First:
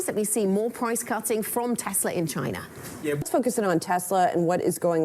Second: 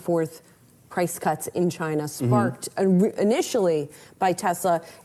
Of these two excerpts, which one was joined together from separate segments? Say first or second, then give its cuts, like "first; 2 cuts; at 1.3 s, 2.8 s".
first; 1 cut; at 3.2 s